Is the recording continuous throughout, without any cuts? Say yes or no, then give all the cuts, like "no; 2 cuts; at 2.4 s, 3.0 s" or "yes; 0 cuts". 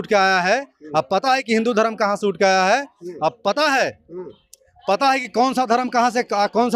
yes; 0 cuts